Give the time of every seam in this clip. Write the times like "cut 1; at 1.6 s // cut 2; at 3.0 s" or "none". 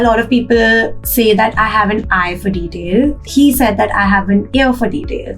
cut 1; at 3.2 s